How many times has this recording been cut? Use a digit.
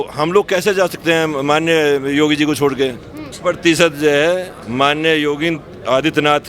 1